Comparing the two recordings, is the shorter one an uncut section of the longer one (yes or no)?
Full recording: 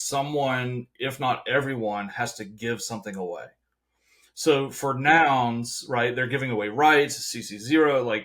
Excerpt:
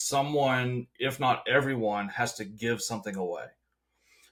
yes